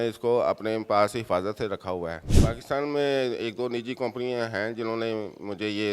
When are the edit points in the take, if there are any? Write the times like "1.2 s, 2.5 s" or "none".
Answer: 2.3 s